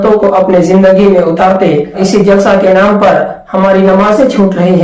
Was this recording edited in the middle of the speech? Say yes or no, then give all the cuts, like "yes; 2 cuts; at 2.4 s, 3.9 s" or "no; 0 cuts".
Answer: yes; 1 cut; at 2.0 s